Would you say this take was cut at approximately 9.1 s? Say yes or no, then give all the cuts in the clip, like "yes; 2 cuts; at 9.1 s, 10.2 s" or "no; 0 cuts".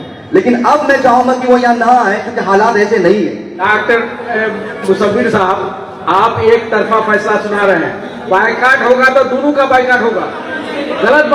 no; 1 cut; at 3.6 s